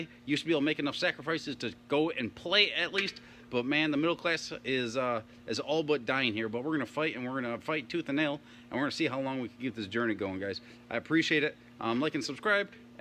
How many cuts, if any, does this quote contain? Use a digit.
0